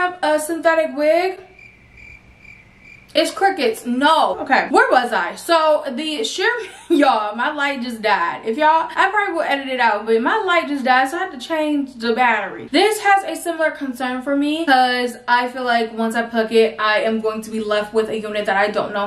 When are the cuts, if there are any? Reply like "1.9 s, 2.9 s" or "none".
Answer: 4.4 s, 12.5 s